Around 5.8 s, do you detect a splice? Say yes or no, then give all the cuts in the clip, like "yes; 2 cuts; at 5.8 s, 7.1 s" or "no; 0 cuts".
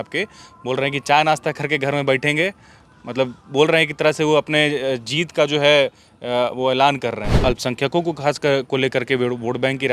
no; 1 cut; at 7.3 s